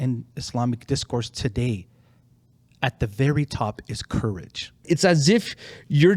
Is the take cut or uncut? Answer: cut